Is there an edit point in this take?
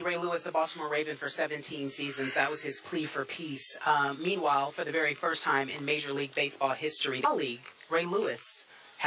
no; 0 cuts

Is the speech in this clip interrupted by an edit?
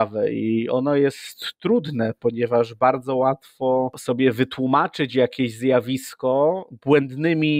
yes; 1 cut; at 4.0 s

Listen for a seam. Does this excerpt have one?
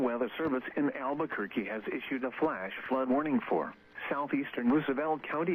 no; 0 cuts

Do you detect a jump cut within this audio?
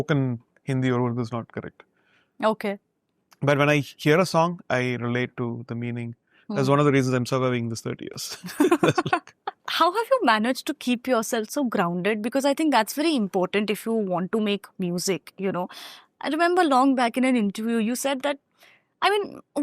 no; 0 cuts

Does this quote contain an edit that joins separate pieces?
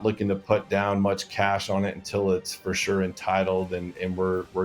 no; 0 cuts

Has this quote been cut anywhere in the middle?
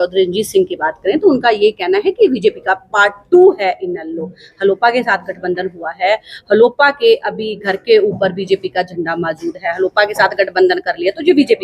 no; 0 cuts

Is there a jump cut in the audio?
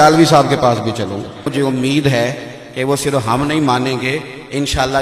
yes; 1 cut; at 1.5 s

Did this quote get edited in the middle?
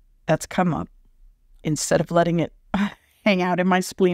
yes; 1 cut; at 1.6 s

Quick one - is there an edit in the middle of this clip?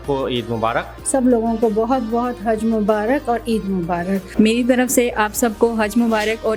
yes; 2 cuts; at 0.9 s, 4.3 s

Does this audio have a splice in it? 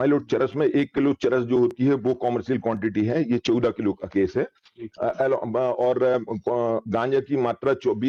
no; 0 cuts

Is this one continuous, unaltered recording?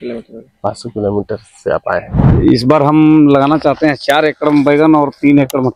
no; 1 cut; at 2.2 s

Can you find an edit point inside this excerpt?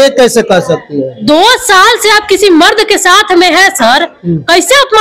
no; 0 cuts

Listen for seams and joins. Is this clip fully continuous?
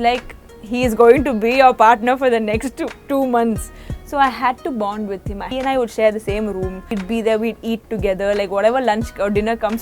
no; 2 cuts; at 5.5 s, 6.9 s

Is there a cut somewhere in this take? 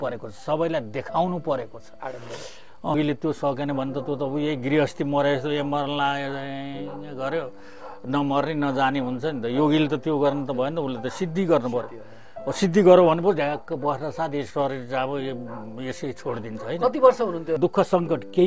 yes; 2 cuts; at 2.9 s, 17.6 s

